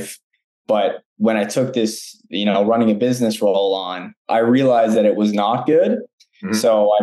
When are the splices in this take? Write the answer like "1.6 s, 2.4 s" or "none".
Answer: none